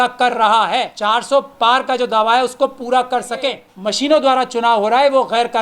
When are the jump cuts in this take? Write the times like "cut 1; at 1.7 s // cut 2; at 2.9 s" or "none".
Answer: cut 1; at 0.9 s // cut 2; at 3.7 s